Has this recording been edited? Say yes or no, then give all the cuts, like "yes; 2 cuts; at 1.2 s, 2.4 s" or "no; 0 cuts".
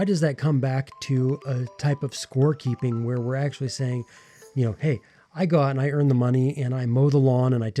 no; 0 cuts